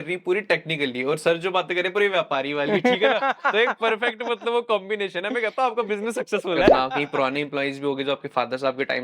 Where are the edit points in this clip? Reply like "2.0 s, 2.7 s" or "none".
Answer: 6.7 s

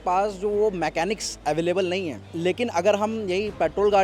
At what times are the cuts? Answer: 2.2 s

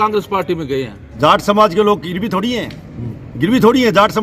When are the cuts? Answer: 1.0 s

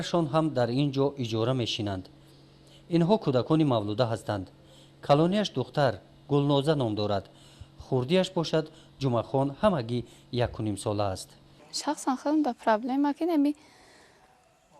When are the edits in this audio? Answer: 12.1 s

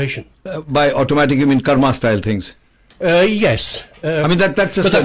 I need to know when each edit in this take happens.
none

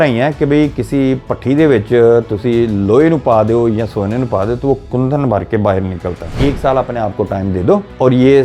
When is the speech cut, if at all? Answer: 6.3 s

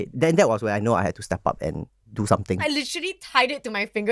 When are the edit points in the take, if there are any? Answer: 2.6 s

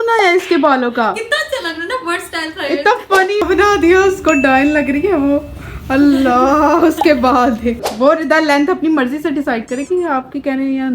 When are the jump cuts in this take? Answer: 3.4 s, 7.9 s

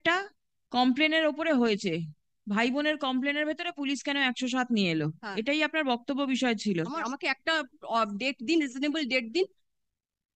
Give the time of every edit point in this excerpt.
7.0 s

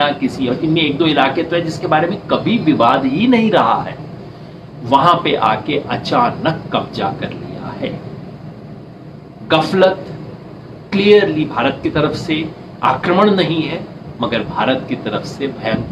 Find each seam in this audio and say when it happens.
none

